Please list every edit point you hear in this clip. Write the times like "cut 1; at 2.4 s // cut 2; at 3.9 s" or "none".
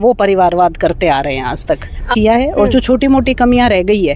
cut 1; at 2.1 s